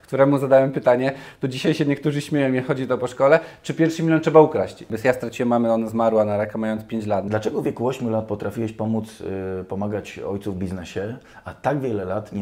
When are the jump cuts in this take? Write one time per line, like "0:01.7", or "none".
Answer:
0:04.9
0:07.3